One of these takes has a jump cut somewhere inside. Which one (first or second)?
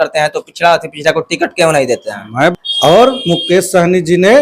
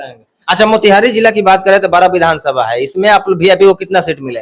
first